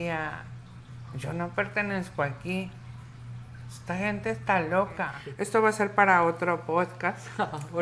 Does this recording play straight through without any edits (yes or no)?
no